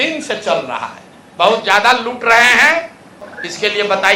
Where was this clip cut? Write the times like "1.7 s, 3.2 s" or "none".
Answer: 3.2 s